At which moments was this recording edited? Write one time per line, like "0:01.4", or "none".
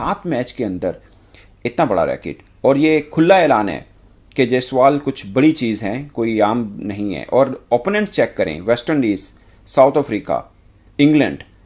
none